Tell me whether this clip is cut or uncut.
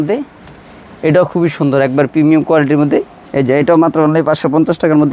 cut